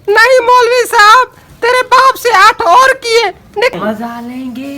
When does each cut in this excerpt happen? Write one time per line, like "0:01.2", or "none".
0:03.7